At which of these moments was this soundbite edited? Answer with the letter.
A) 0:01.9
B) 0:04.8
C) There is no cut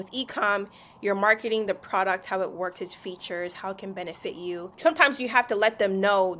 B